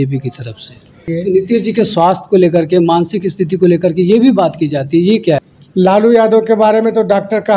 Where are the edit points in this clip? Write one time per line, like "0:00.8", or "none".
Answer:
0:01.0
0:05.4